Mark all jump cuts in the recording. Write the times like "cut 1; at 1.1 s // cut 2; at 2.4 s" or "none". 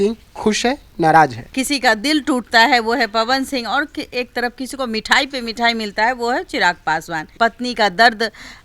cut 1; at 1.5 s // cut 2; at 7.3 s